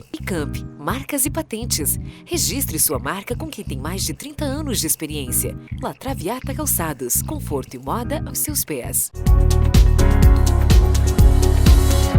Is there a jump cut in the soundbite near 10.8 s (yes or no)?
no